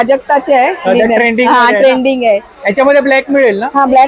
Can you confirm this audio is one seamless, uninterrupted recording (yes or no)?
yes